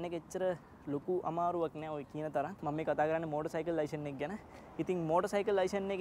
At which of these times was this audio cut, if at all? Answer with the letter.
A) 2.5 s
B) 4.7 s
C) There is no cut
A